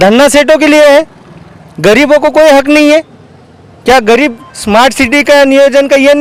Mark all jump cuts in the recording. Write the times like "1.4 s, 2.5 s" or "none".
none